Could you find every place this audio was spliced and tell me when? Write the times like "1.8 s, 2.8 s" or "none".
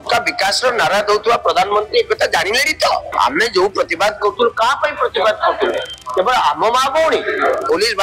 3.1 s